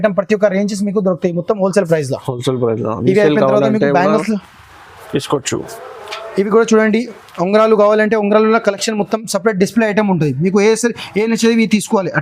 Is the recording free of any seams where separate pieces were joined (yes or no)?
yes